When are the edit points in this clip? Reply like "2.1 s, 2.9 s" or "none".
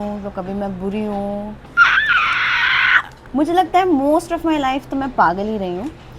1.6 s, 3.1 s